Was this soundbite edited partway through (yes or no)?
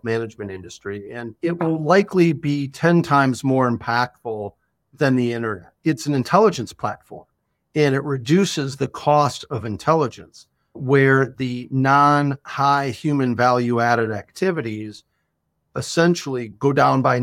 yes